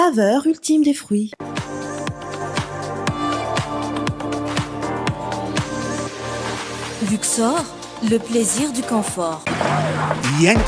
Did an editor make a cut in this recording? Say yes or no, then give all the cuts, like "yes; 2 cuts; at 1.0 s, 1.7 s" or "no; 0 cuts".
yes; 2 cuts; at 1.4 s, 9.4 s